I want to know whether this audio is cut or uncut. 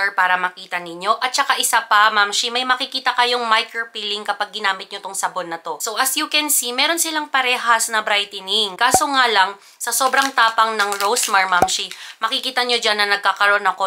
cut